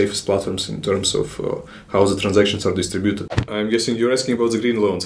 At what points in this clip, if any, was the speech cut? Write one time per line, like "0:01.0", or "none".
0:03.3

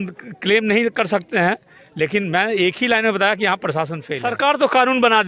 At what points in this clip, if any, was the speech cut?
0:04.1

